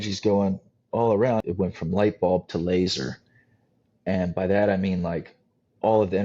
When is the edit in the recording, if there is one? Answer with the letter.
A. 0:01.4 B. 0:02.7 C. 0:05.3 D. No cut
A